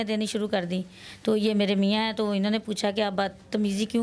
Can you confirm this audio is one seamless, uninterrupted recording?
yes; 0 cuts

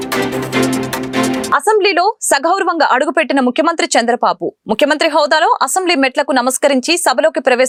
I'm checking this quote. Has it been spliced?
no; 0 cuts

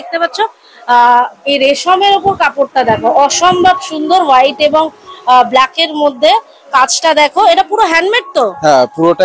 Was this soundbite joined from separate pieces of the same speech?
no; 0 cuts

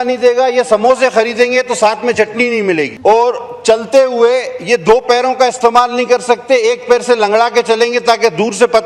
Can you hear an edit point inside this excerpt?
yes; 1 cut; at 2.9 s

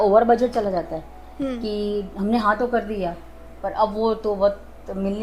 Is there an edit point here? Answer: no; 0 cuts

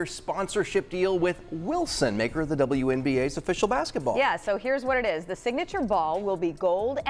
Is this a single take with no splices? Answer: yes; 0 cuts

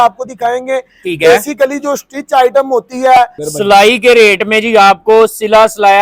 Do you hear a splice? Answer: yes; 1 cut; at 3.4 s

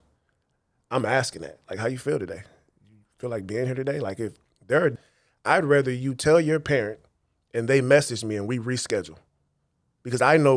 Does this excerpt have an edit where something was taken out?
yes; 1 cut; at 4.9 s

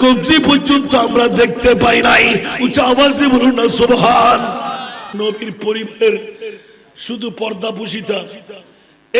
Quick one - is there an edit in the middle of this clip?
yes; 1 cut; at 5.0 s

